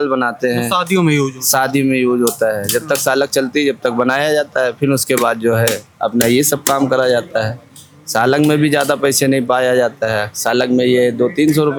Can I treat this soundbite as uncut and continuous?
yes; 0 cuts

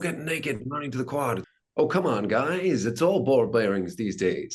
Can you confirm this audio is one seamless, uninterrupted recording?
no; 1 cut; at 1.5 s

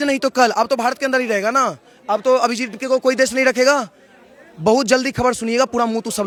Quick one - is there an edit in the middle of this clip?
no; 0 cuts

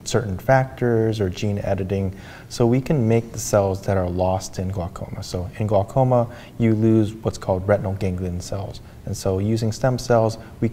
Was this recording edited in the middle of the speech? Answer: no; 0 cuts

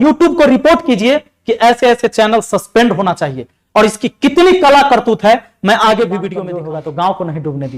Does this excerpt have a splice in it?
yes; 1 cut; at 6.5 s

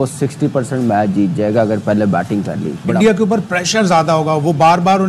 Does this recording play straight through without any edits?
no; 1 cut; at 2.8 s

